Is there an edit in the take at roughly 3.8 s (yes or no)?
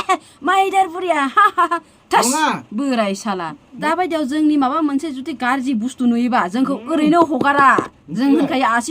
yes